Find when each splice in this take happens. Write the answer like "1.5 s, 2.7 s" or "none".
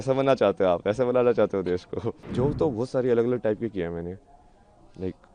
2.2 s